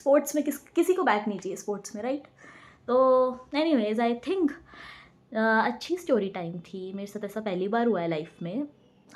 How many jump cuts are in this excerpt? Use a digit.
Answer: 0